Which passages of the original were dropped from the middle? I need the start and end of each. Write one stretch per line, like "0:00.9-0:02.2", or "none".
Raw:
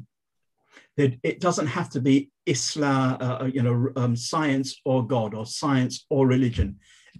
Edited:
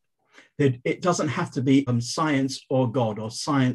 0:02.3-0:04.0